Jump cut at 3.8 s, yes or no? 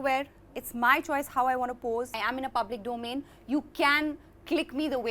no